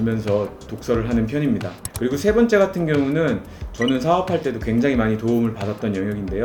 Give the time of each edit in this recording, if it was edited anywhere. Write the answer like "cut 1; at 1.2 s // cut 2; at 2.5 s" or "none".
none